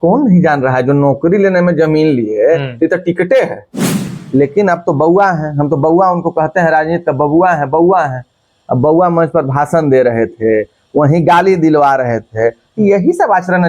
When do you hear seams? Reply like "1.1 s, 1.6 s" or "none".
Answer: 3.9 s